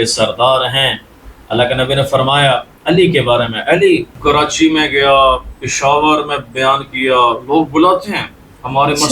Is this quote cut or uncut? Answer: cut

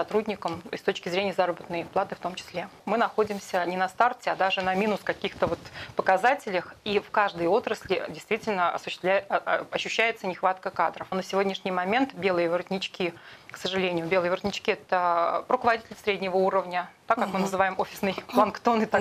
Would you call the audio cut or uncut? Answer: cut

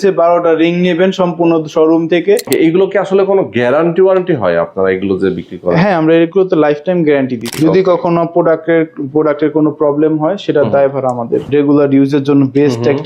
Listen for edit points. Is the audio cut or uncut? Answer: cut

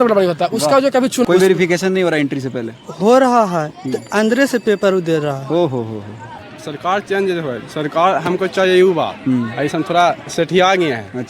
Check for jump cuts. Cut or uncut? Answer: cut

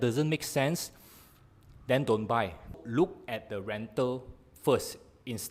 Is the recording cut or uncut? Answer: cut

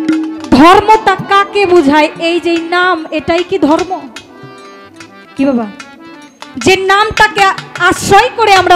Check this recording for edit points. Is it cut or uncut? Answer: uncut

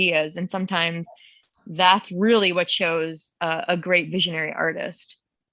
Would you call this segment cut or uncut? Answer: uncut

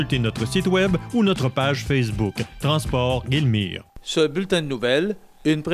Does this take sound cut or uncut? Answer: cut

